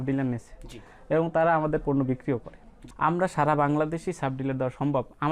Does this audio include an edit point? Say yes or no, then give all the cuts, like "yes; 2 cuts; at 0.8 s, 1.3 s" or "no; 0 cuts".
yes; 1 cut; at 2.8 s